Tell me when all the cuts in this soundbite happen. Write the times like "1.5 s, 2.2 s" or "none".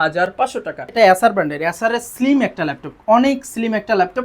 0.9 s